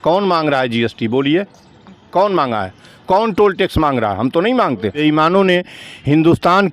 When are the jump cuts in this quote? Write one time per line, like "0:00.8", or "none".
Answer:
0:05.0

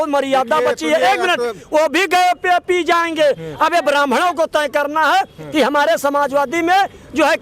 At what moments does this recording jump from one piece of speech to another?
none

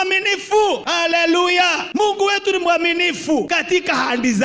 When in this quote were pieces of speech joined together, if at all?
0:00.8
0:01.8
0:03.5

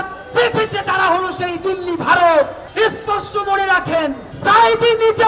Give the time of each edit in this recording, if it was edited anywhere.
0:02.6
0:04.3

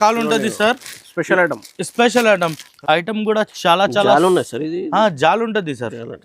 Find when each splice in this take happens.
0:02.7

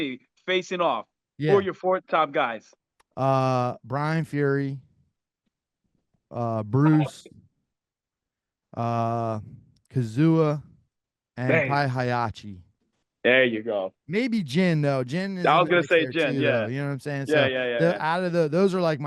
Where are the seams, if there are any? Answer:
none

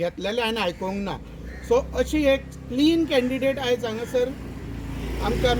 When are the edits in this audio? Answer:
none

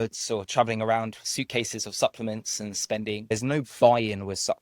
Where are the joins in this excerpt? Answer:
0:03.3

